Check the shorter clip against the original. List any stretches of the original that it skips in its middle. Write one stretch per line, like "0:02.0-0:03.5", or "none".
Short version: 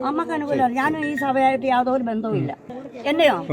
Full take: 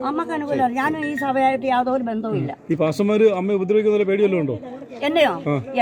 0:02.6-0:04.5